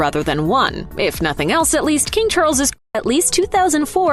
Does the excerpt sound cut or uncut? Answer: uncut